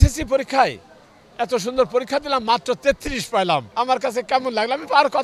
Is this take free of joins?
no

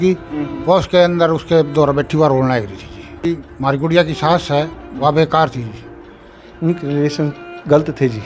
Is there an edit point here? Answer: yes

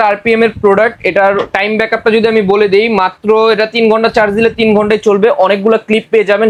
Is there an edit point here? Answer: no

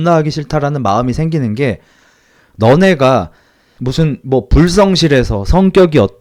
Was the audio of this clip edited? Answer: no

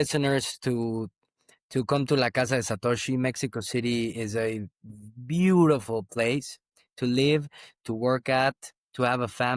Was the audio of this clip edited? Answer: no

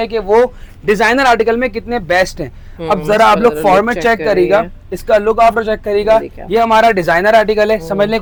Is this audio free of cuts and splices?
yes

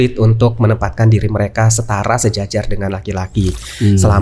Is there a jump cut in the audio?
no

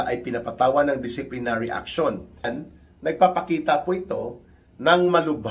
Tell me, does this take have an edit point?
yes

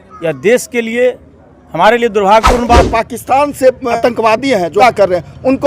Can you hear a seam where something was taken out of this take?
yes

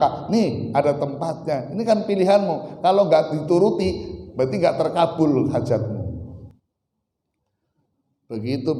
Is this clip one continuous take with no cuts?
no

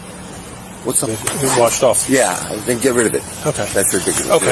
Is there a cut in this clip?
yes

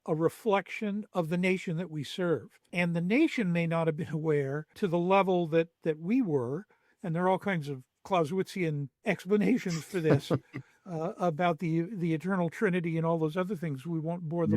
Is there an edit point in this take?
yes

